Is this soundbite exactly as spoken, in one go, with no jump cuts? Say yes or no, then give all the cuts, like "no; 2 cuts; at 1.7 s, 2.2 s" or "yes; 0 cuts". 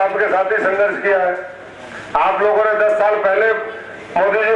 yes; 0 cuts